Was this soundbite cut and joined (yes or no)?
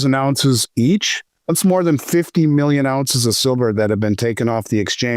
no